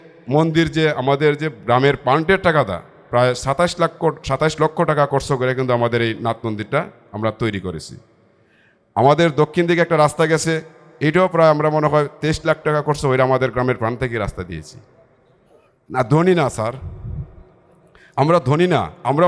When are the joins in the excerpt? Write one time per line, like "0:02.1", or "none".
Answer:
none